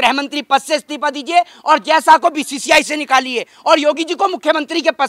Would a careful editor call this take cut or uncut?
uncut